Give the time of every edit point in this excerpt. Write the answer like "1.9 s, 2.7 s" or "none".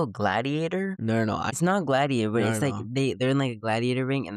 1.2 s